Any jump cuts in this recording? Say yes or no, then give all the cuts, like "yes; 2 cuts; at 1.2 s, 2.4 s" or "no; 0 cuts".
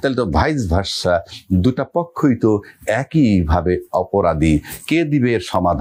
no; 0 cuts